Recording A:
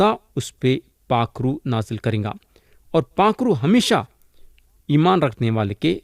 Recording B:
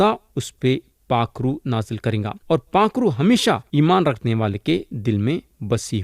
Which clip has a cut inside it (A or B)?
B